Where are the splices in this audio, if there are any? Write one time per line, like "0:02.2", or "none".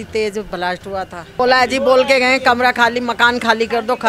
0:01.4